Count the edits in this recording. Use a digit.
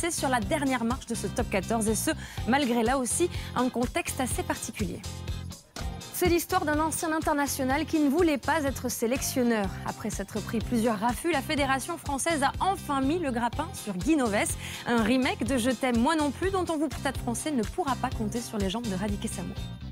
0